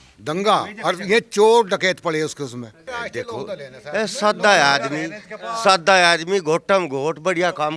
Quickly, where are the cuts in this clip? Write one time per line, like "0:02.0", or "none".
0:02.9